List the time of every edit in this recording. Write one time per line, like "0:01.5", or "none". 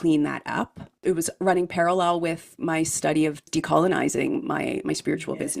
0:01.0
0:02.6
0:03.5